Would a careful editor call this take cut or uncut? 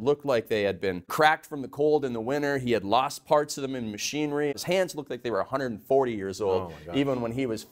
cut